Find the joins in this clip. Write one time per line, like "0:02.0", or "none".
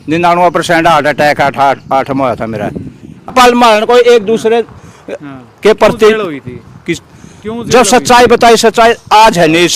0:03.3